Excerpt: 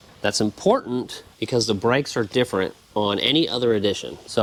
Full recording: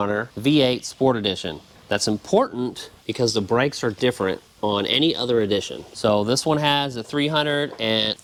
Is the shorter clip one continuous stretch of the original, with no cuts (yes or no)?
yes